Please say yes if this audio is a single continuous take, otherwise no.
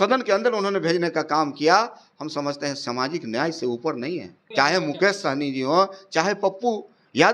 no